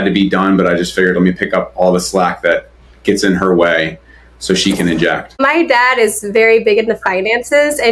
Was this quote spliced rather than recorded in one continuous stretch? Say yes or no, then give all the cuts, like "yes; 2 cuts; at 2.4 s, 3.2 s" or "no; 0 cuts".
yes; 1 cut; at 5.4 s